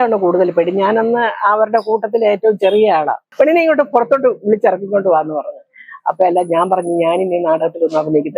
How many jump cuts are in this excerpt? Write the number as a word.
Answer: one